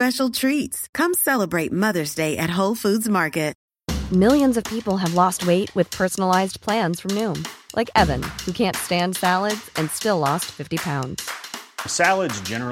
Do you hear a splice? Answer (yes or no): yes